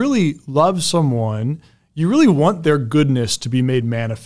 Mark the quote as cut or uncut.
uncut